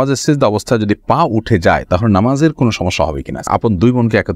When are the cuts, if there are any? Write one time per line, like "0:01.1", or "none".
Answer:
0:03.5